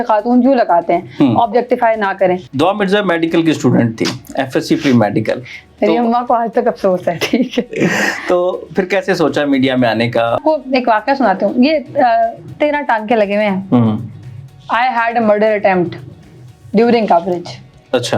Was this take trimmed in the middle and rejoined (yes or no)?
yes